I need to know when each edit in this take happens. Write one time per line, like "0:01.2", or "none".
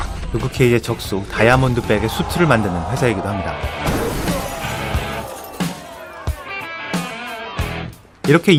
none

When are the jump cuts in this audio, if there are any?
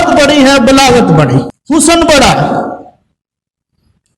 0:01.6

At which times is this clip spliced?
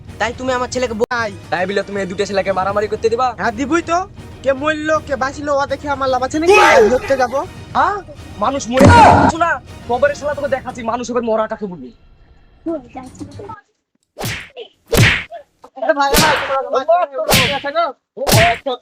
0:01.0

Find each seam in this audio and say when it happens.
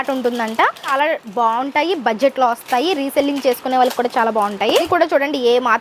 0:00.9
0:04.9

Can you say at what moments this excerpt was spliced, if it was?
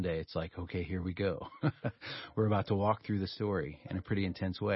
none

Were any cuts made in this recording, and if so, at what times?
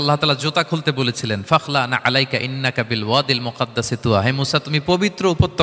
none

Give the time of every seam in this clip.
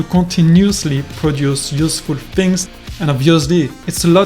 0:02.8

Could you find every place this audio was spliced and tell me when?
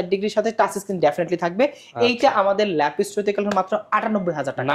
none

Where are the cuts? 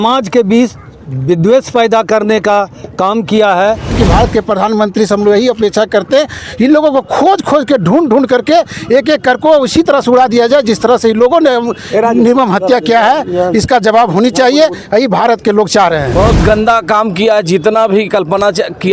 0:03.9
0:16.1

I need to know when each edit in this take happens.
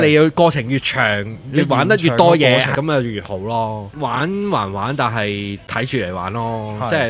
0:02.7
0:03.9
0:05.6

